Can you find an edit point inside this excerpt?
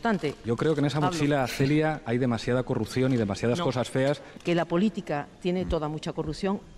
yes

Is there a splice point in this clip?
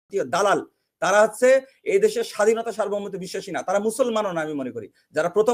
no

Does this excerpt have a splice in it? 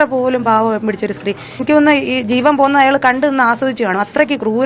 yes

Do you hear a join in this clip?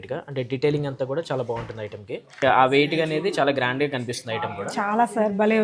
yes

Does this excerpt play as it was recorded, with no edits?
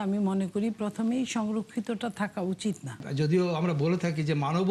no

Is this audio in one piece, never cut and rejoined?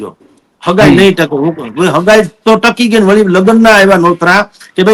yes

